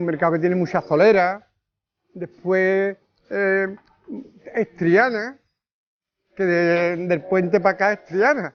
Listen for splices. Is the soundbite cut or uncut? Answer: uncut